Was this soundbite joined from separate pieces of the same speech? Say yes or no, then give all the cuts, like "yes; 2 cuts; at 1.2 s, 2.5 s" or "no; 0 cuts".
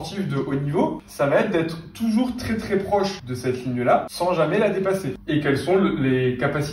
yes; 4 cuts; at 1.0 s, 3.3 s, 4.1 s, 5.2 s